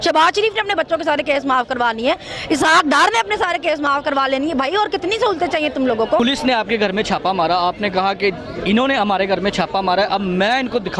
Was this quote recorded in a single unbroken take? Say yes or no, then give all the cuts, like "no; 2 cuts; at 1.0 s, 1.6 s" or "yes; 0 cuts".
no; 1 cut; at 6.2 s